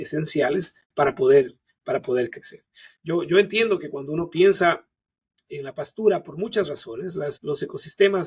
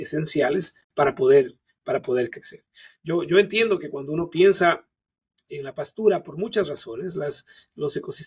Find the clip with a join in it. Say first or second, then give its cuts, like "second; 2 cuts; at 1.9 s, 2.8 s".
first; 1 cut; at 7.4 s